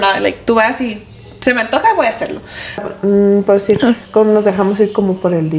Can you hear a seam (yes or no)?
yes